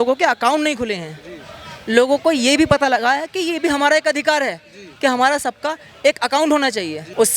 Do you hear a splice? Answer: no; 0 cuts

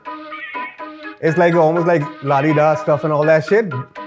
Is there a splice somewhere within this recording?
no; 0 cuts

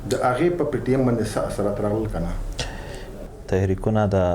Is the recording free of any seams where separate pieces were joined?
no; 1 cut; at 3.2 s

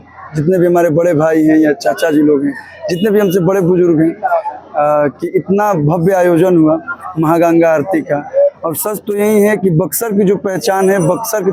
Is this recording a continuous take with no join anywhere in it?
yes; 0 cuts

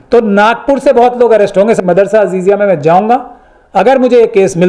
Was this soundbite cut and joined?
yes; 1 cut; at 1.8 s

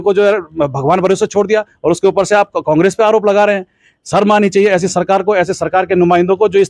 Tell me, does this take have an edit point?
no; 0 cuts

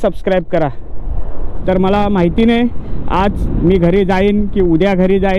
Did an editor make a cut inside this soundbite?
yes; 1 cut; at 1.5 s

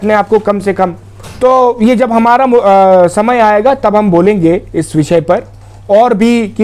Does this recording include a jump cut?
no; 0 cuts

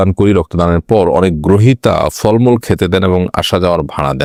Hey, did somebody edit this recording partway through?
no; 0 cuts

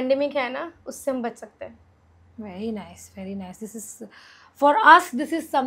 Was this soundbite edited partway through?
no; 0 cuts

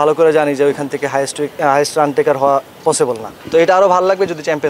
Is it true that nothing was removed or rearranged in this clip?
no; 1 cut; at 3.3 s

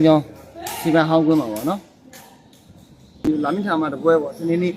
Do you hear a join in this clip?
yes; 1 cut; at 3.3 s

